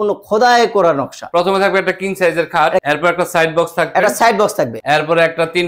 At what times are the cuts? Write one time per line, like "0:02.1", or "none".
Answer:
0:01.3
0:02.8